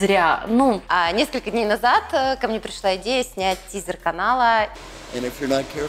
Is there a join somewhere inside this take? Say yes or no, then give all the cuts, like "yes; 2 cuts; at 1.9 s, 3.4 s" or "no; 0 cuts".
yes; 2 cuts; at 0.8 s, 4.9 s